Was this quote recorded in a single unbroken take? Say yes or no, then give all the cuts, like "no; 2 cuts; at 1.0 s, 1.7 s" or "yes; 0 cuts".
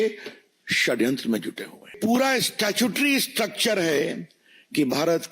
no; 1 cut; at 1.9 s